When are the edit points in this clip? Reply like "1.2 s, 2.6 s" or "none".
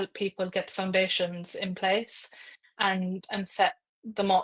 none

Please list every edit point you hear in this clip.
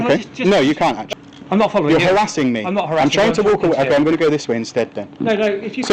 1.0 s

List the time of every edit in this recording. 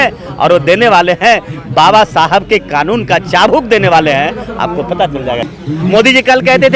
5.4 s

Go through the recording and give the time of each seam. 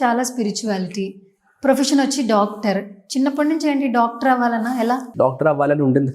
5.1 s

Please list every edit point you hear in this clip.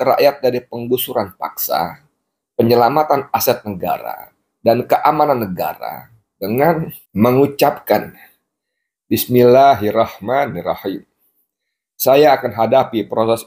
7.0 s

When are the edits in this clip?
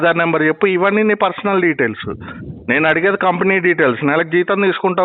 none

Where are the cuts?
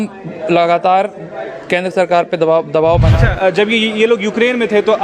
3.1 s

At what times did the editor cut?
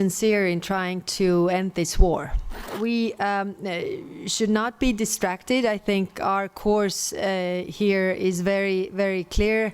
2.7 s

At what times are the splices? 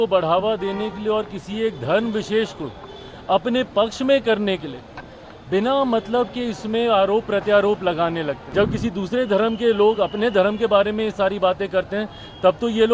8.4 s

